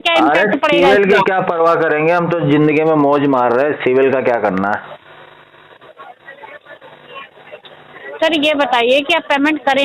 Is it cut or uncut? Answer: uncut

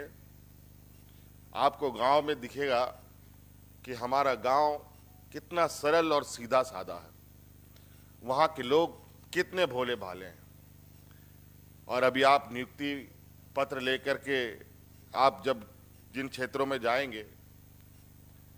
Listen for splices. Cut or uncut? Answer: uncut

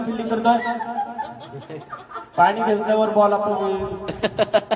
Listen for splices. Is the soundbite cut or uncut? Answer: uncut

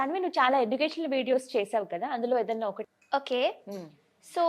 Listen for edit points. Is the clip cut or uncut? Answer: cut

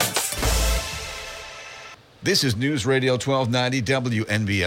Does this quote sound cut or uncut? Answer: cut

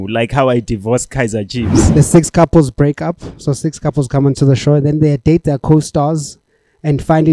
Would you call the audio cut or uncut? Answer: cut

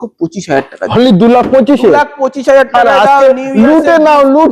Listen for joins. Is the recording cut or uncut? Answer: uncut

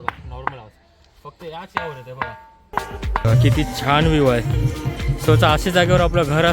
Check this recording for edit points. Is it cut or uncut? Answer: cut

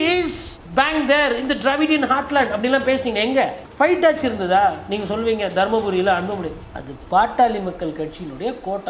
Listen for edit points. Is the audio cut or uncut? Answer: uncut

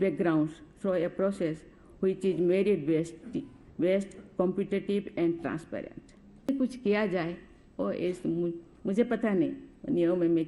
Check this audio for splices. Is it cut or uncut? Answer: cut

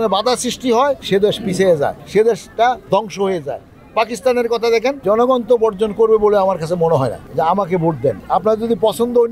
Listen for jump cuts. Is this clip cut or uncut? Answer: cut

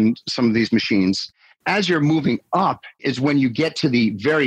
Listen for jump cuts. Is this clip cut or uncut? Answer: cut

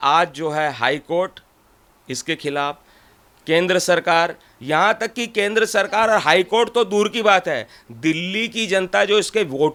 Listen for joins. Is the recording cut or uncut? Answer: uncut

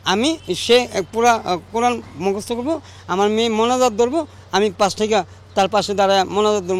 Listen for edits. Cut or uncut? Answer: uncut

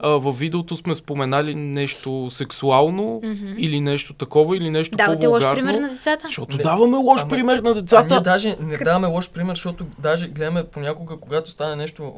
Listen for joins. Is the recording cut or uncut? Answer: uncut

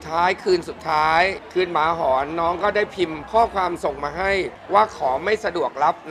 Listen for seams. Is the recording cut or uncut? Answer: cut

